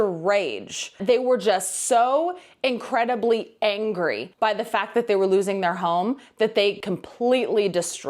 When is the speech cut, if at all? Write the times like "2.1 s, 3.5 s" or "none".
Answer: 0.9 s, 6.8 s